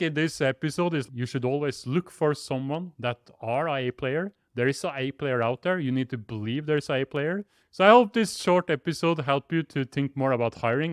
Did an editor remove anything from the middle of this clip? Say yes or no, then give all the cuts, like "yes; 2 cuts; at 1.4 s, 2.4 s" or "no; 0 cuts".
yes; 2 cuts; at 1.0 s, 7.6 s